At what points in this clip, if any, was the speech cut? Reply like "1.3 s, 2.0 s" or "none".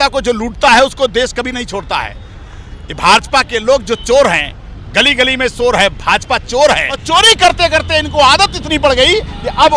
6.9 s